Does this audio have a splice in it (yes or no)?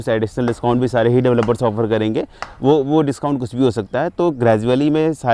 no